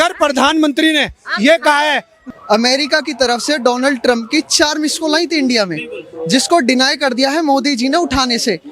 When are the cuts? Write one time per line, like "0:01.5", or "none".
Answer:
0:02.1